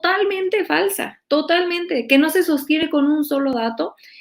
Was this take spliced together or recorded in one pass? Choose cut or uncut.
uncut